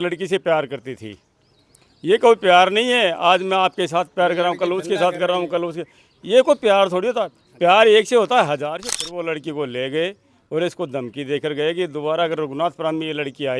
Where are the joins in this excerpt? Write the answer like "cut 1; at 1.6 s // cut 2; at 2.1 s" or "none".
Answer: cut 1; at 8.8 s